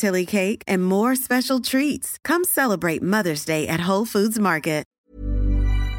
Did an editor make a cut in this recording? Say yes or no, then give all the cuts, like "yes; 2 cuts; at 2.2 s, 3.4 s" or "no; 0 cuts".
yes; 1 cut; at 4.9 s